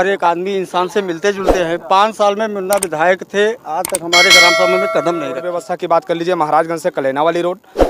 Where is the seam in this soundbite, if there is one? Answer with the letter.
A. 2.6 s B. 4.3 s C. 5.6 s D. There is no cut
C